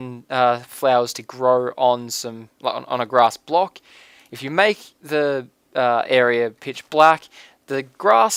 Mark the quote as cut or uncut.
uncut